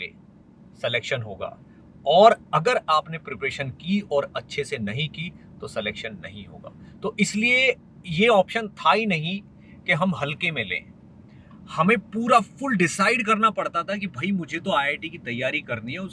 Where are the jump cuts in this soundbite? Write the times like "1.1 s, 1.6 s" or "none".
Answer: none